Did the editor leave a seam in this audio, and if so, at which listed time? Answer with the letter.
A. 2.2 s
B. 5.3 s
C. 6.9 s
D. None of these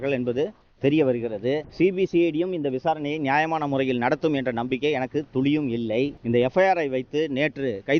D